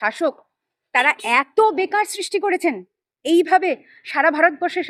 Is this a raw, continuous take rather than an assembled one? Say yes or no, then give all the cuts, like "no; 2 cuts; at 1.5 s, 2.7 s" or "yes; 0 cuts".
yes; 0 cuts